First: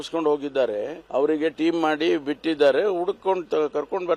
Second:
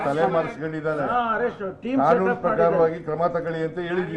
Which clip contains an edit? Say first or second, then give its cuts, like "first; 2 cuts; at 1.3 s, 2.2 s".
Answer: first; 1 cut; at 1.0 s